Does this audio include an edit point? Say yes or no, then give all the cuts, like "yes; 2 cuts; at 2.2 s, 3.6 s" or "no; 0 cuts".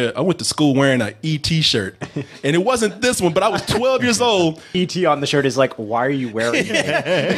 yes; 1 cut; at 4.7 s